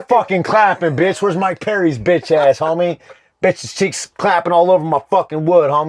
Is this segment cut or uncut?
uncut